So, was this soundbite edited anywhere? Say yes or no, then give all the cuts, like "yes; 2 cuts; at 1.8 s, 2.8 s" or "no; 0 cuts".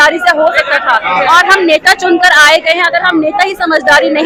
no; 0 cuts